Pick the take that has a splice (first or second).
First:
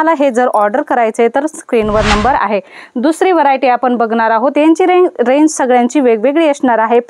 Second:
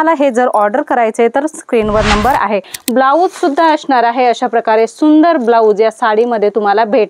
second